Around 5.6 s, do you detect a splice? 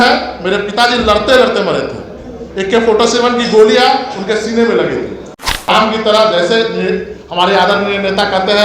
yes; 1 cut; at 5.6 s

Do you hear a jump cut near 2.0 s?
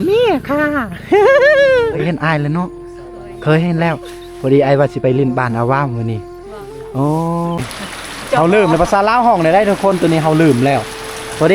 yes; 2 cuts; at 2.0 s, 7.7 s

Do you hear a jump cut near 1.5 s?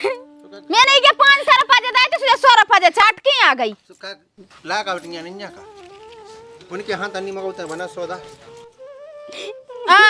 no; 0 cuts

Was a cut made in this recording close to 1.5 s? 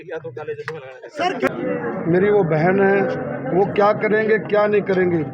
yes; 1 cut; at 1.5 s

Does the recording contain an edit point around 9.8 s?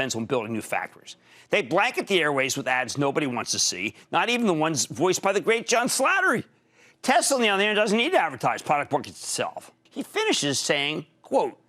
yes; 1 cut; at 9.8 s

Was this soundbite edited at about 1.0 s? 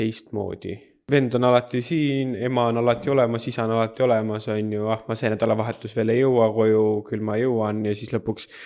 yes; 1 cut; at 1.0 s

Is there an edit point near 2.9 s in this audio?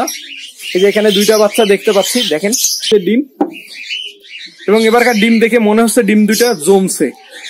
yes; 1 cut; at 2.9 s

